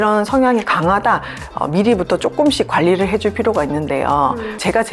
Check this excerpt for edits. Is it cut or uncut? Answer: cut